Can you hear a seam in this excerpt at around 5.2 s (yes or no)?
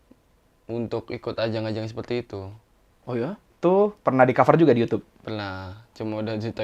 no